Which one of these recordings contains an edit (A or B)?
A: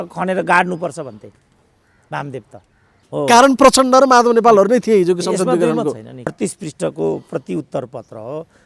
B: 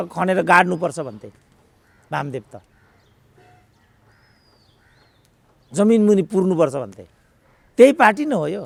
A